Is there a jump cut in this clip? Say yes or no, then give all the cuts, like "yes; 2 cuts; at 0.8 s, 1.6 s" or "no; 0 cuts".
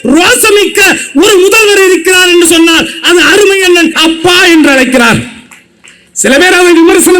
yes; 1 cut; at 3.9 s